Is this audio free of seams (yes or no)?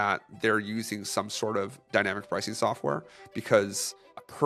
yes